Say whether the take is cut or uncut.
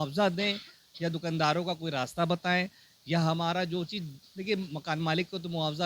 uncut